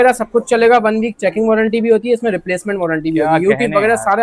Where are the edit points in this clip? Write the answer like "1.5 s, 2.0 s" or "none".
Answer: none